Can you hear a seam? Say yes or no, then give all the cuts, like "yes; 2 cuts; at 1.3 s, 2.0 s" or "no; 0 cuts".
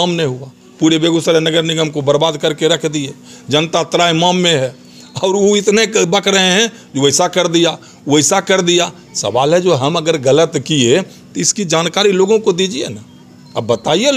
no; 0 cuts